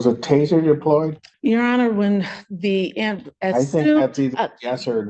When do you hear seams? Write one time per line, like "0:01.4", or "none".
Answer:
0:01.2